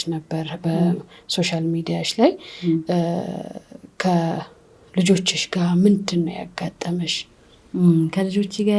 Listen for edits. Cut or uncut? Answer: uncut